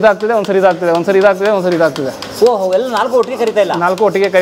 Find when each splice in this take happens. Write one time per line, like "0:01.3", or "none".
none